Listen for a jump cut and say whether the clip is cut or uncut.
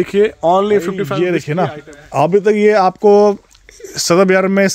cut